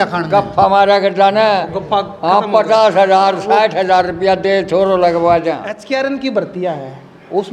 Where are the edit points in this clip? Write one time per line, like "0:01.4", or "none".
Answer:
0:05.7